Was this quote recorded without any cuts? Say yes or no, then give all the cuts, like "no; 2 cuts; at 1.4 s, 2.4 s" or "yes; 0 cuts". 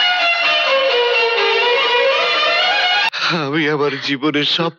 no; 1 cut; at 3.1 s